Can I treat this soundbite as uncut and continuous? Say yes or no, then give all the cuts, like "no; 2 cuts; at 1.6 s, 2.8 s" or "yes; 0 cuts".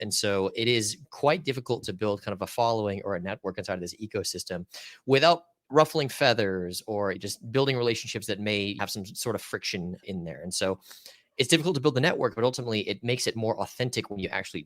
no; 4 cuts; at 5.5 s, 7.2 s, 8.8 s, 10.0 s